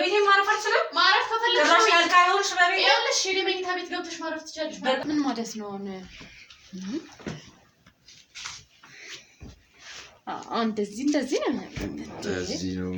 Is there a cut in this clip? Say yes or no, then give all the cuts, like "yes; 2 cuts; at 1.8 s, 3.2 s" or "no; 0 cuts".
yes; 1 cut; at 5.0 s